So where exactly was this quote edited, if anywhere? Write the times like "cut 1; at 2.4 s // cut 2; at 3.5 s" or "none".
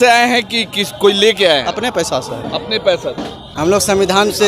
cut 1; at 3.5 s

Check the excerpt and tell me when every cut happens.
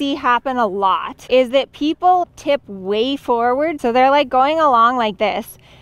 cut 1; at 1.1 s // cut 2; at 2.2 s // cut 3; at 3.8 s

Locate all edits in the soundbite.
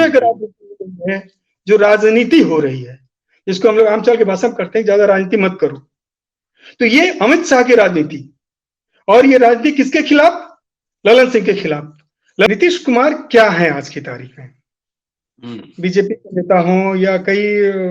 cut 1; at 12.5 s

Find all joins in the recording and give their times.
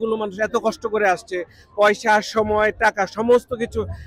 none

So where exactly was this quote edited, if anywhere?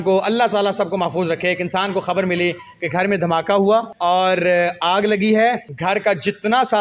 cut 1; at 3.9 s // cut 2; at 5.7 s

